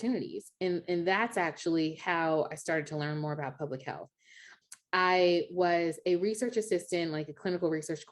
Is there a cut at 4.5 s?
yes; 1 cut; at 4.5 s

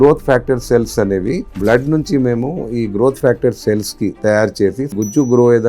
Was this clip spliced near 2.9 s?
no; 2 cuts; at 1.5 s, 4.9 s

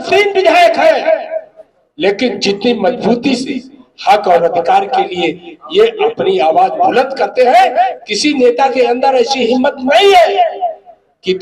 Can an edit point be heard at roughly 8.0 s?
yes; 1 cut; at 8.0 s

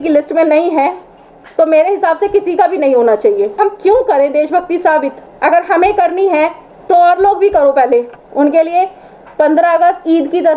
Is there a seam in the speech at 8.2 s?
yes; 4 cuts; at 3.6 s, 5.2 s, 6.7 s, 8.2 s

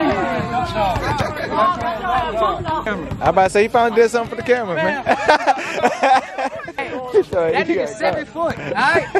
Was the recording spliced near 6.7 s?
yes; 2 cuts; at 2.9 s, 6.7 s

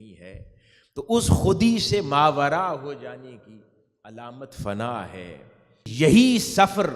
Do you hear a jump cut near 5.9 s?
yes; 1 cut; at 5.9 s

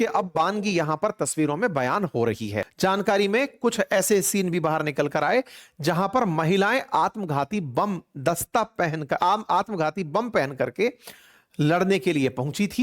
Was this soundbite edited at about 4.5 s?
no; 1 cut; at 2.6 s

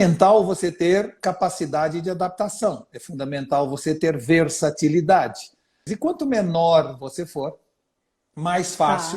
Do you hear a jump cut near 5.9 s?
yes; 1 cut; at 5.9 s

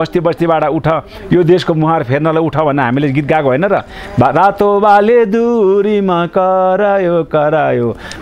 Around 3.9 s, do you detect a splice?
no; 0 cuts

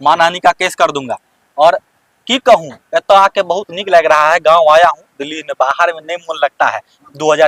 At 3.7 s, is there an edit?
no; 0 cuts

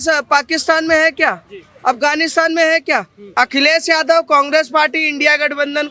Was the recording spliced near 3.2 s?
yes; 1 cut; at 3.2 s

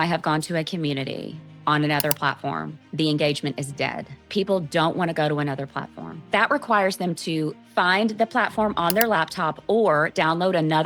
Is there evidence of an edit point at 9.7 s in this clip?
no; 3 cuts; at 4.3 s, 6.3 s, 7.6 s

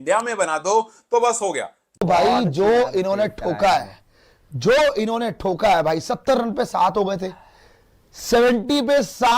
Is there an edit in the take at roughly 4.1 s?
no; 1 cut; at 1.9 s

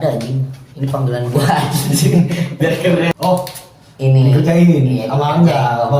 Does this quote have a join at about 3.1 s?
yes; 1 cut; at 3.1 s

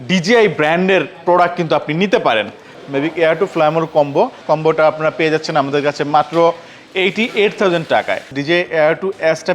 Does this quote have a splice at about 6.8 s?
no; 3 cuts; at 2.8 s, 4.4 s, 8.3 s

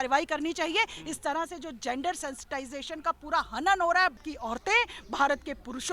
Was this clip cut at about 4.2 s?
yes; 1 cut; at 4.2 s

